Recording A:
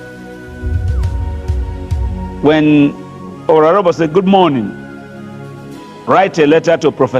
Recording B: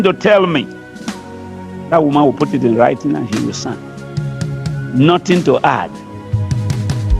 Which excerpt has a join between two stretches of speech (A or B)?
A